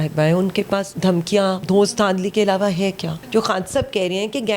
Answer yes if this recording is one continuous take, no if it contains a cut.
no